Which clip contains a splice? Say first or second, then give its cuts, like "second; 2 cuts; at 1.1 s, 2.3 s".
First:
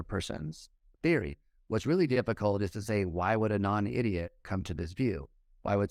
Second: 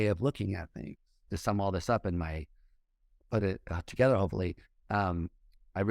second; 1 cut; at 1.2 s